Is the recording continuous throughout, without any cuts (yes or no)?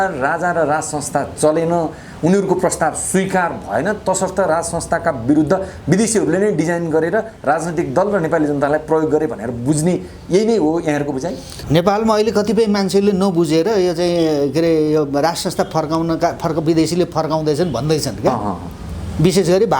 no